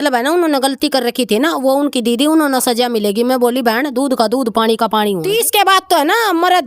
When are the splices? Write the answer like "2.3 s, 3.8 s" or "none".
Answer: 5.2 s